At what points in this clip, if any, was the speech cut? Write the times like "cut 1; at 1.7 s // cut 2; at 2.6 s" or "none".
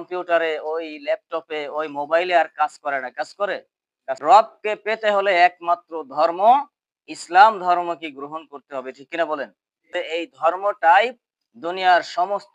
cut 1; at 4.0 s // cut 2; at 9.9 s